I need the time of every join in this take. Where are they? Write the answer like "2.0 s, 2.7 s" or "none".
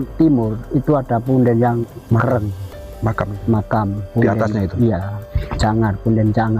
2.0 s